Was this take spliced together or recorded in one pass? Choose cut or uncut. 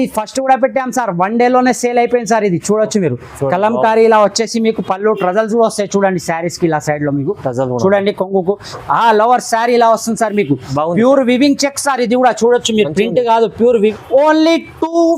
cut